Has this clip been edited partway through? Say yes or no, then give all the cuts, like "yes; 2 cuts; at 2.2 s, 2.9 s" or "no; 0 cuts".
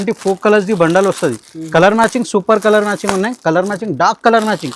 no; 0 cuts